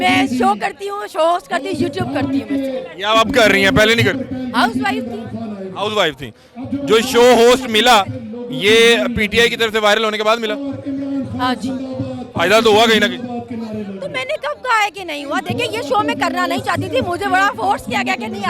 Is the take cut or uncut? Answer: uncut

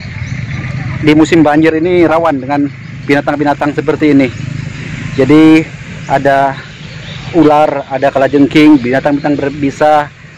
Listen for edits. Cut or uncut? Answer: uncut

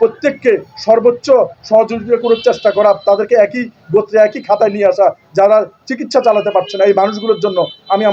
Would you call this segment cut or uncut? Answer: uncut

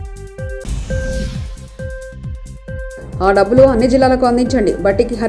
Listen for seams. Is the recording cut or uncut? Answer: uncut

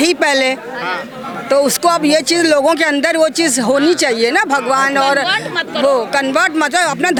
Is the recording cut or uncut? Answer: uncut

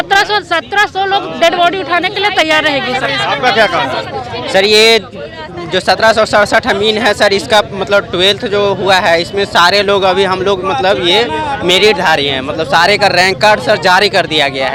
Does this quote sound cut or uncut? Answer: uncut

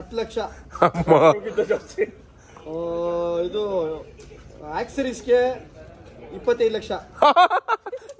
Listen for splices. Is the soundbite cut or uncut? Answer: uncut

